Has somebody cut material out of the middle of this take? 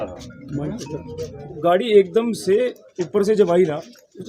yes; 1 cut; at 1.4 s

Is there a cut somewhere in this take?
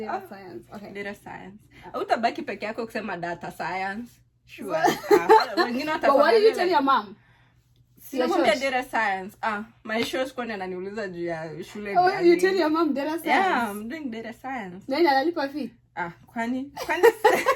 no; 0 cuts

